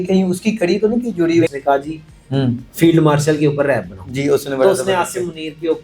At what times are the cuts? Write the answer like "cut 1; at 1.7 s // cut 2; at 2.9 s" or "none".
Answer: cut 1; at 1.5 s